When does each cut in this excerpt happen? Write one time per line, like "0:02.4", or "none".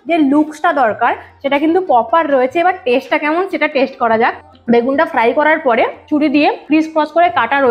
0:04.5
0:06.5